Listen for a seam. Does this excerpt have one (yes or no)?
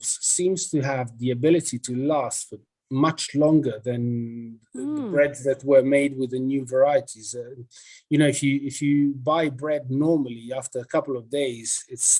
no